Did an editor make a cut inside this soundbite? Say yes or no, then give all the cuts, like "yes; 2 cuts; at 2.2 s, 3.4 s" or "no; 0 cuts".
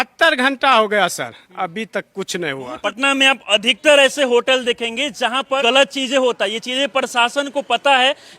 yes; 2 cuts; at 2.8 s, 5.6 s